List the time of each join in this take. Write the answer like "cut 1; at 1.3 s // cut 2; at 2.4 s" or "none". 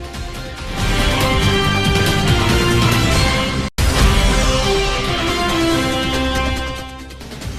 none